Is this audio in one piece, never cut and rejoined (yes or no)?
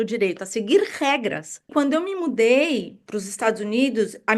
no